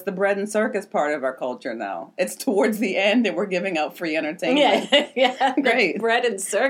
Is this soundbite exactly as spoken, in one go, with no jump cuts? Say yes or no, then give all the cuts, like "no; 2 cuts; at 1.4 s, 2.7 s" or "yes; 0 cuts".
yes; 0 cuts